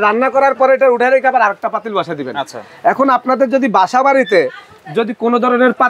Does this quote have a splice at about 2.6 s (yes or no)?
no